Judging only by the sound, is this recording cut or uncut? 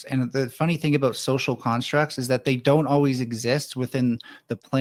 uncut